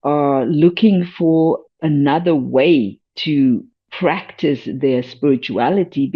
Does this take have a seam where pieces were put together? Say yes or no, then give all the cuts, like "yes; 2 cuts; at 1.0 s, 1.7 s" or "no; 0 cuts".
no; 0 cuts